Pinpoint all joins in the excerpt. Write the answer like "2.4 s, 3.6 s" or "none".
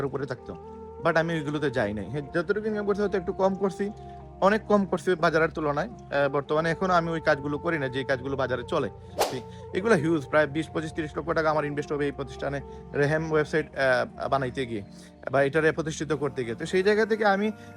9.2 s